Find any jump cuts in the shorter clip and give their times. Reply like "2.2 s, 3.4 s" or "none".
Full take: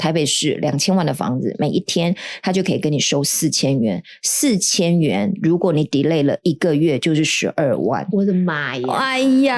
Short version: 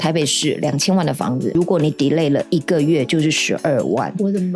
1.6 s

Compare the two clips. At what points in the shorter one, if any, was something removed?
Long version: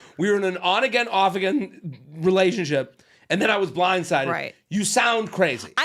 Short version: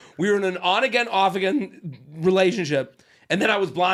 none

